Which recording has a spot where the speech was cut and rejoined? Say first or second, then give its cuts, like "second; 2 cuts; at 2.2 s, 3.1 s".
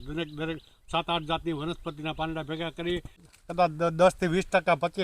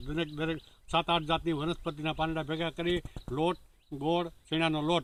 first; 1 cut; at 3.2 s